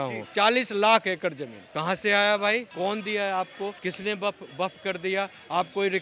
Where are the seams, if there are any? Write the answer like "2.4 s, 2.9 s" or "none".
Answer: none